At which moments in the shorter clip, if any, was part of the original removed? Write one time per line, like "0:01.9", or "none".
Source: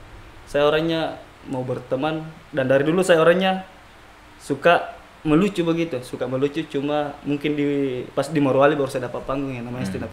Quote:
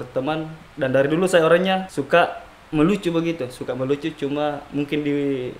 0:01.9